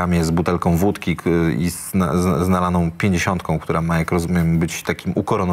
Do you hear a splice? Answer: no; 0 cuts

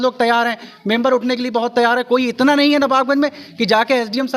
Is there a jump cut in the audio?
no; 0 cuts

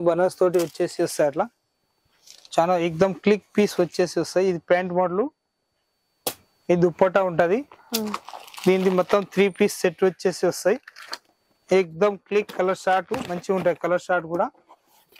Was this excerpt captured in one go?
yes; 0 cuts

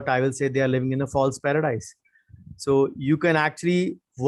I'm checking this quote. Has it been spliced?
no; 0 cuts

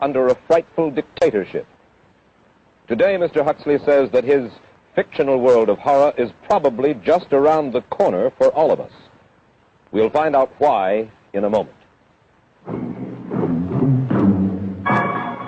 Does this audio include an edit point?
no; 0 cuts

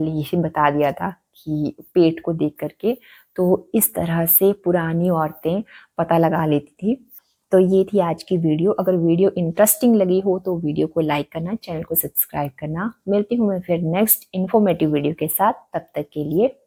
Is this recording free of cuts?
yes; 0 cuts

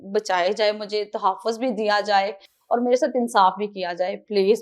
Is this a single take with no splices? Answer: yes; 0 cuts

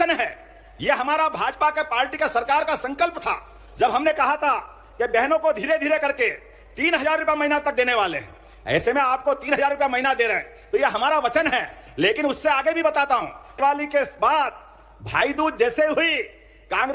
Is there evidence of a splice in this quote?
yes; 1 cut; at 13.6 s

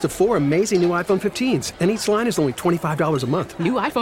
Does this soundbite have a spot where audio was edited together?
no; 0 cuts

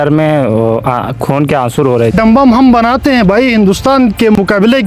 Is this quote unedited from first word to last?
no; 1 cut; at 2.1 s

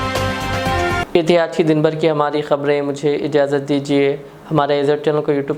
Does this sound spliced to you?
no; 0 cuts

